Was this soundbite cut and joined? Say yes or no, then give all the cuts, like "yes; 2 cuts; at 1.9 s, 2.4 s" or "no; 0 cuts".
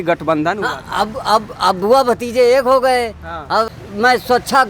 yes; 1 cut; at 3.7 s